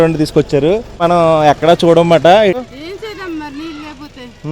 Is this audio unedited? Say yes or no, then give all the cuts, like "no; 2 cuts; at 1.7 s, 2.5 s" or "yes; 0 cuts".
no; 2 cuts; at 1.0 s, 2.6 s